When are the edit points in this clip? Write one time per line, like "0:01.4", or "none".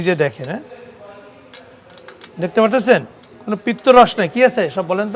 none